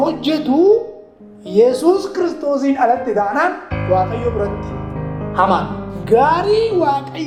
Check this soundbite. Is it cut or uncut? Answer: uncut